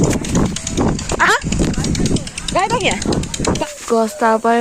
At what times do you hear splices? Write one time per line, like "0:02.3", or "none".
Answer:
0:03.7